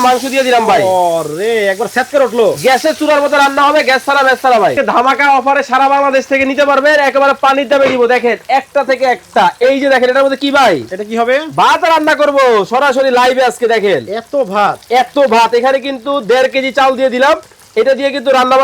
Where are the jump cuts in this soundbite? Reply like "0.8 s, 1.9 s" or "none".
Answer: 4.7 s